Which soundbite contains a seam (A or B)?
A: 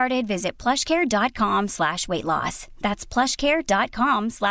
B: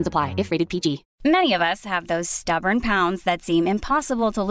B